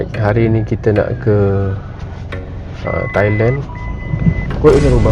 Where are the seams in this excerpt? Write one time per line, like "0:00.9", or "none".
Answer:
none